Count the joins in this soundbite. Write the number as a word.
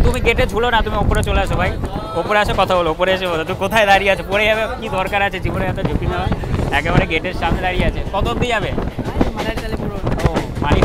zero